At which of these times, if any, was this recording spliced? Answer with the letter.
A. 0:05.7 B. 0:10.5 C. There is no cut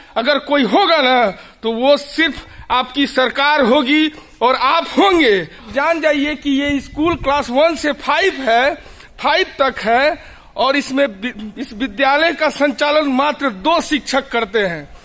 A